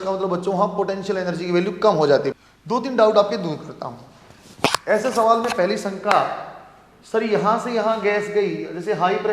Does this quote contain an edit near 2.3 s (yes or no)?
yes